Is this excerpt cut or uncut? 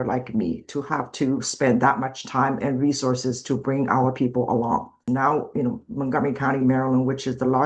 cut